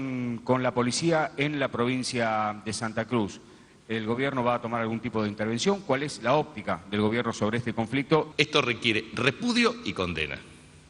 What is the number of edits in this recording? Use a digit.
1